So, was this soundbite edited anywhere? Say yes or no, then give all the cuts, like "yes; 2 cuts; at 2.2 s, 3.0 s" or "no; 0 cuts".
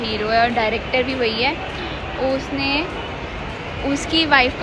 no; 0 cuts